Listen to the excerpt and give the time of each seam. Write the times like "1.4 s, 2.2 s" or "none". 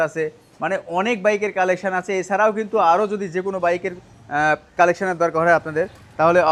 none